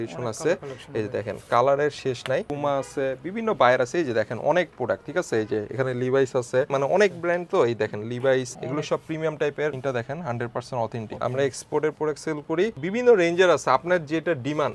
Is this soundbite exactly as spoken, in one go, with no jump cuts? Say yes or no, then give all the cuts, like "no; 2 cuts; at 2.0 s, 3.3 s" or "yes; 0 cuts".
no; 6 cuts; at 2.5 s, 6.7 s, 8.6 s, 9.8 s, 11.1 s, 12.8 s